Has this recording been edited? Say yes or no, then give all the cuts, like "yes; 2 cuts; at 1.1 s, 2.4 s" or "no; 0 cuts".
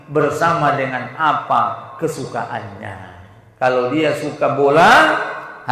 no; 0 cuts